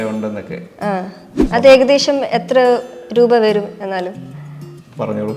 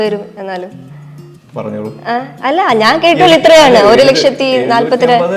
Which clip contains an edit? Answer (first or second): first